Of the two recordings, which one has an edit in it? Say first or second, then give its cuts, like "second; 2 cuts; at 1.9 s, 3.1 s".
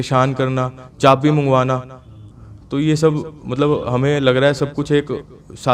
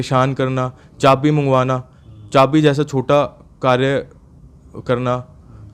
first; 1 cut; at 2.2 s